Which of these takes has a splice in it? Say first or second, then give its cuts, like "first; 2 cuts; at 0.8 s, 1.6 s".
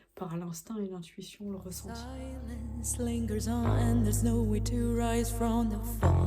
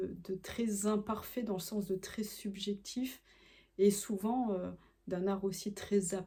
first; 1 cut; at 2.0 s